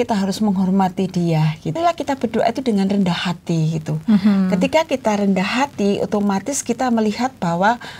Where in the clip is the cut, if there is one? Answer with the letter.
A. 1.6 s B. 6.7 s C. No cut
A